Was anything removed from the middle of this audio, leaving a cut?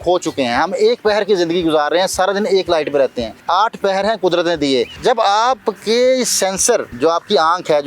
yes; 3 cuts; at 3.3 s, 4.9 s, 6.9 s

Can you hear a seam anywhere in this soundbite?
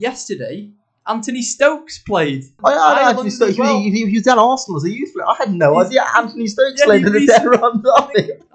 yes; 1 cut; at 2.5 s

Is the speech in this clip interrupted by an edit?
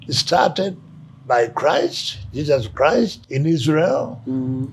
yes; 1 cut; at 3.2 s

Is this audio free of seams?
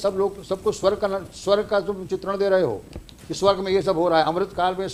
yes; 0 cuts

